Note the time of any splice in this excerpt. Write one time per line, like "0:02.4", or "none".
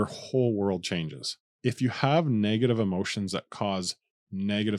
0:01.5